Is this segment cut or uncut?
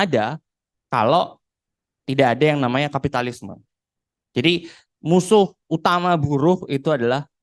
uncut